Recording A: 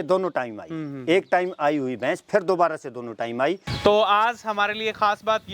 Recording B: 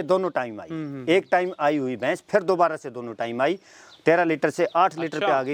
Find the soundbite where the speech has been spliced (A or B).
A